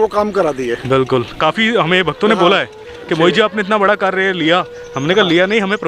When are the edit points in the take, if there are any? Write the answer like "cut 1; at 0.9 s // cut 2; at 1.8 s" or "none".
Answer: cut 1; at 1.4 s